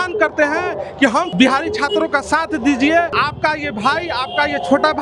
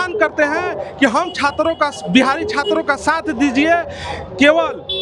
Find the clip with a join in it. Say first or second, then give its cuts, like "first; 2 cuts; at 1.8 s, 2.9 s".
first; 2 cuts; at 1.3 s, 3.2 s